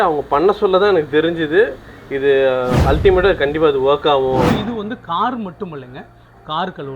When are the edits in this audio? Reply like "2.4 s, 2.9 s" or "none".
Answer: 4.5 s

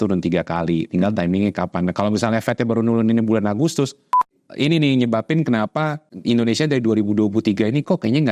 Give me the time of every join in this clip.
4.3 s, 6.1 s

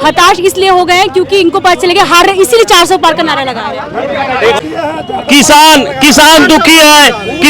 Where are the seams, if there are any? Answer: 4.6 s

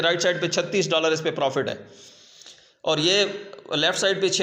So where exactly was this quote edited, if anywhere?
none

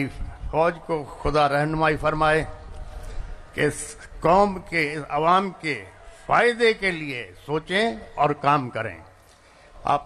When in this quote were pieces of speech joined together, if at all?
none

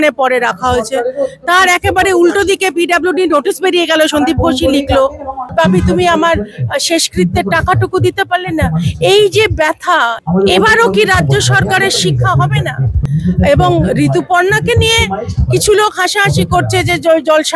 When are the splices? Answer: 5.5 s, 10.1 s, 13.0 s

